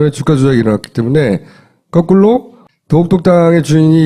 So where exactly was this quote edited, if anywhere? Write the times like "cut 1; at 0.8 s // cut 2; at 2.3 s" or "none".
cut 1; at 1.9 s